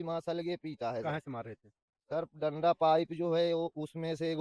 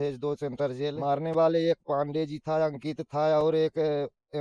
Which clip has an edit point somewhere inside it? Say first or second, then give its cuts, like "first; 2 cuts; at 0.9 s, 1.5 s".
second; 1 cut; at 1.0 s